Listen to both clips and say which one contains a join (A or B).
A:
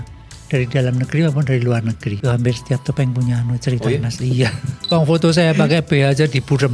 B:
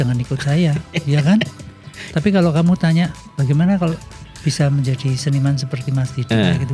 A